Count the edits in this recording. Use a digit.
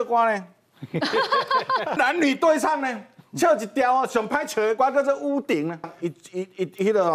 2